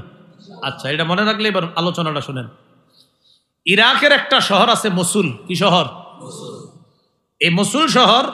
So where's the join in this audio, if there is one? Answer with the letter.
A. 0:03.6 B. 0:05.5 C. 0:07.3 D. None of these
D